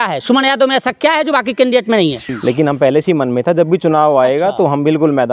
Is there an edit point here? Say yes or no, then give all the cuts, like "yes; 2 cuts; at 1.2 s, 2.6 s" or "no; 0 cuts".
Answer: yes; 1 cut; at 2.2 s